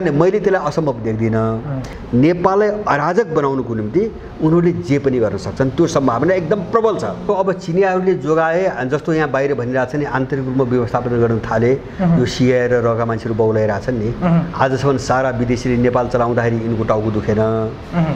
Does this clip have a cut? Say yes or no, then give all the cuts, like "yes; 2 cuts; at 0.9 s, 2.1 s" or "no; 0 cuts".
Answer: yes; 2 cuts; at 1.9 s, 7.2 s